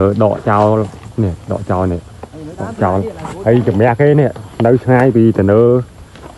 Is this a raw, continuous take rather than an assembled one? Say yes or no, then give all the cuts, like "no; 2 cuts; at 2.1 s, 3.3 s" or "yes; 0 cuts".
yes; 0 cuts